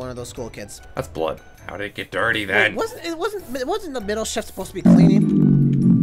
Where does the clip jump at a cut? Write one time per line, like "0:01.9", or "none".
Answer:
0:01.5